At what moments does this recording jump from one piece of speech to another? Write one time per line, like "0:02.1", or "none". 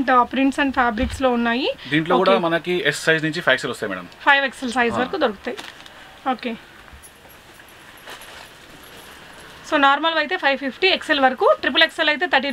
none

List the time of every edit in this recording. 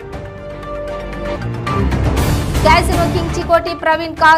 none

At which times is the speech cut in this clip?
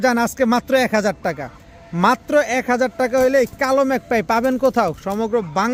none

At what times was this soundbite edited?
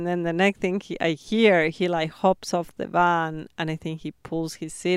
none

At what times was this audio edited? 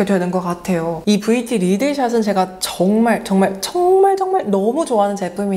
0:01.0

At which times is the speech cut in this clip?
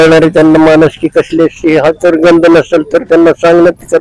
none

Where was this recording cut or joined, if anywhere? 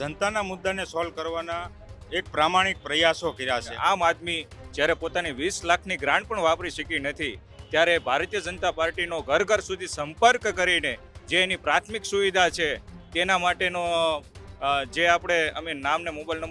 0:03.7

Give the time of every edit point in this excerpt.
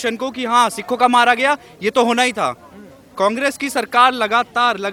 none

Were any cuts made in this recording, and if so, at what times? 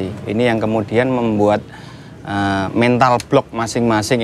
none

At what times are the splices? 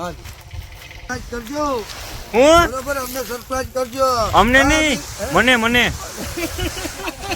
0:01.1

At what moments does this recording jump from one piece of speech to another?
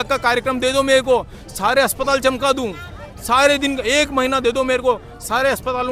none

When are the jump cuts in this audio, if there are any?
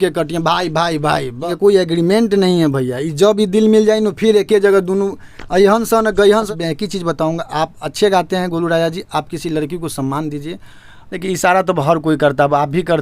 0:01.5
0:06.5
0:11.2

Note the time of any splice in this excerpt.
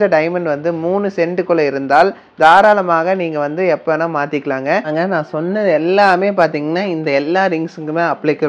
0:04.9

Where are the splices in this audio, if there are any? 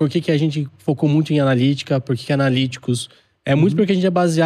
none

